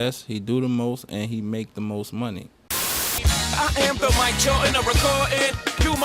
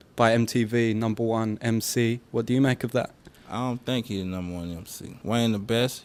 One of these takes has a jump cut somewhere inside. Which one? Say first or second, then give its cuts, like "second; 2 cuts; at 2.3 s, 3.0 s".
first; 1 cut; at 2.7 s